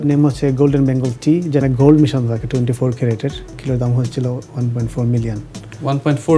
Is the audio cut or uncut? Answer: cut